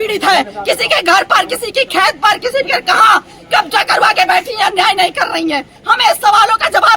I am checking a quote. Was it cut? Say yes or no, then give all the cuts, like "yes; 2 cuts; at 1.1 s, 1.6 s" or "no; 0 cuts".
yes; 1 cut; at 5.7 s